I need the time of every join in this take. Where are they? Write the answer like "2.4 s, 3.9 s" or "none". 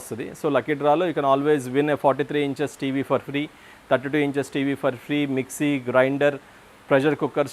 none